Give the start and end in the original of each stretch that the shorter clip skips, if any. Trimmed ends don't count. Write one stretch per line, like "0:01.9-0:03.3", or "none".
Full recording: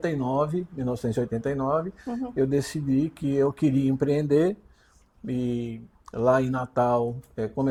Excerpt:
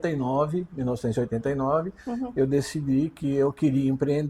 none